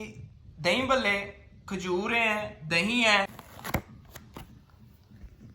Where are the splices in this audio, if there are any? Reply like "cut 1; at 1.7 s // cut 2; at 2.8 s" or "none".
none